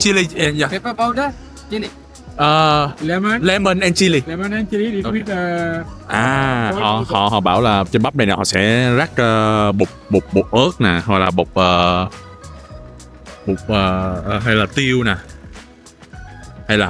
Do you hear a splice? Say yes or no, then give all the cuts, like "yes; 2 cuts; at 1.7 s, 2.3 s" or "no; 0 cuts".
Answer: no; 0 cuts